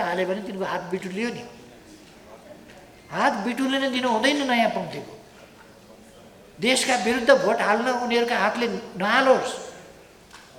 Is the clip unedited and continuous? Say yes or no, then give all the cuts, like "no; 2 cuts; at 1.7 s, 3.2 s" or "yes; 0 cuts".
yes; 0 cuts